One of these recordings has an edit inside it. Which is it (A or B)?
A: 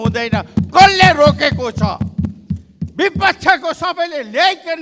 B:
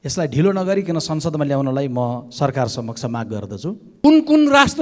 B